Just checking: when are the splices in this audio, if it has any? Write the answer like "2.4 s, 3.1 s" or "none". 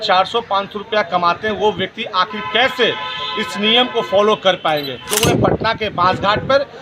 5.1 s